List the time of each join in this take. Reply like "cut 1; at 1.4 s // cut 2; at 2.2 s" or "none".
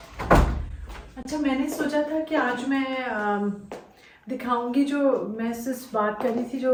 none